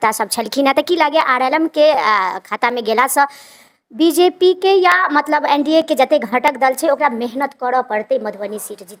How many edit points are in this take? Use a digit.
0